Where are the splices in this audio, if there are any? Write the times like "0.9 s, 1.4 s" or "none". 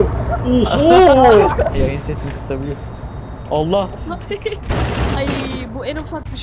1.7 s